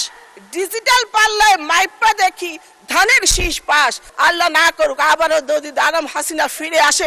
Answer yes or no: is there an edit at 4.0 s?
yes